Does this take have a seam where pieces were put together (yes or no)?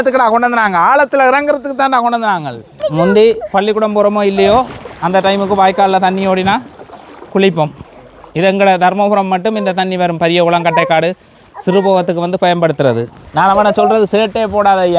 yes